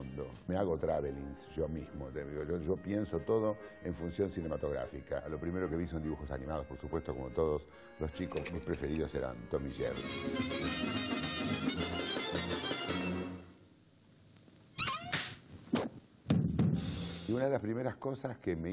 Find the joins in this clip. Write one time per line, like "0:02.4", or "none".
0:07.3